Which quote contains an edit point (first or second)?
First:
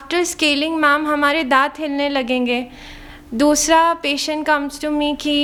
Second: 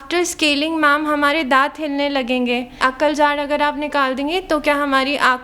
second